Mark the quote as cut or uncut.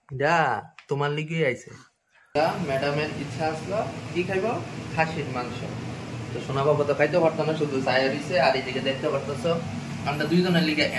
cut